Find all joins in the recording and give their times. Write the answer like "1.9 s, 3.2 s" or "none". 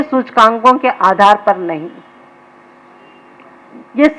none